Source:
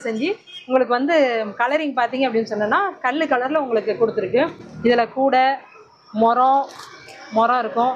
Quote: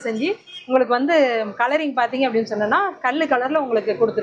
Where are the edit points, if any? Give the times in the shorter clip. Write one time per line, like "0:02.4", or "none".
none